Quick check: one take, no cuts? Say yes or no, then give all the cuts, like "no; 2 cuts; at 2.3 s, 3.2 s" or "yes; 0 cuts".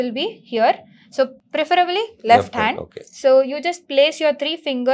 yes; 0 cuts